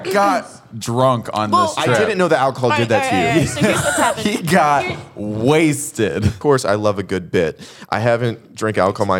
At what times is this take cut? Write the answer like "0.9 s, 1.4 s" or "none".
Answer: 6.4 s